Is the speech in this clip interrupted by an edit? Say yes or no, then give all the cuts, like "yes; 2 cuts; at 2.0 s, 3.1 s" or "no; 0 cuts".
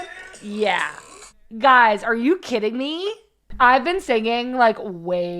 yes; 1 cut; at 1.6 s